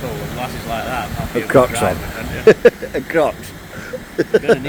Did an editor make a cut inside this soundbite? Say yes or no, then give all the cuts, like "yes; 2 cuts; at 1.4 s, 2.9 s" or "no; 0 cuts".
no; 0 cuts